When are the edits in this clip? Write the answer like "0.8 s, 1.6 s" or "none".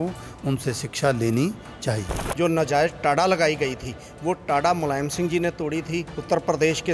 2.2 s

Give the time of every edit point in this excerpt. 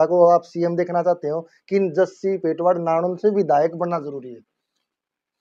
none

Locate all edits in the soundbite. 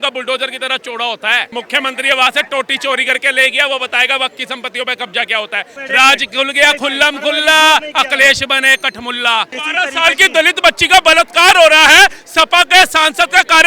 1.5 s, 5.8 s, 9.6 s

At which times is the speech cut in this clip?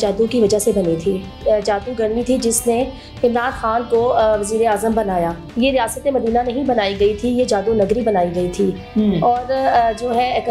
1.4 s, 5.5 s

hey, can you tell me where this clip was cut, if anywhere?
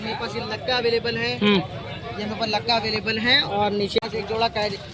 4.0 s

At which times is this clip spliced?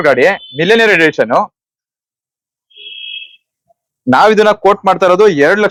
none

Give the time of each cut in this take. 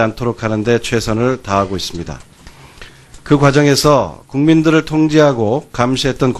none

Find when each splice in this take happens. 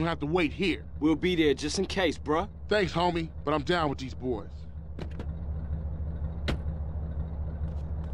none

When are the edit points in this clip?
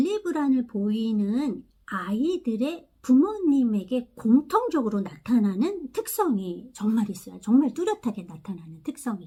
none

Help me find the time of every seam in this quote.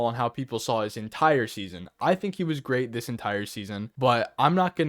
3.9 s

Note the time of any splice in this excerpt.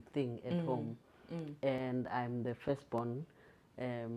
none

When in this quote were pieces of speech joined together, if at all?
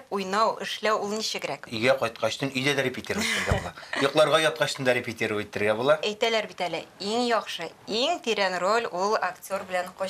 1.6 s, 6.1 s

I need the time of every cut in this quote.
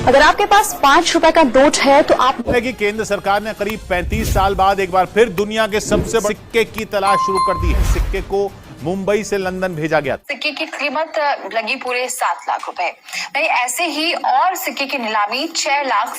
2.4 s

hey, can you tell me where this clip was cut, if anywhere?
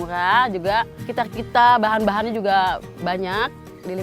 1.0 s

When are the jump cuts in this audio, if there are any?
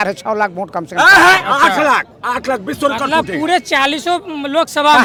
none

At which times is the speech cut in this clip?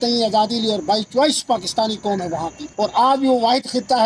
2.6 s

